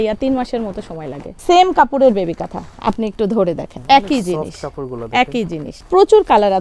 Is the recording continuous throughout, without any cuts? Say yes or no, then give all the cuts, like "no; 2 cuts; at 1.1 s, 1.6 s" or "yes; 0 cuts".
no; 3 cuts; at 1.3 s, 3.7 s, 5.7 s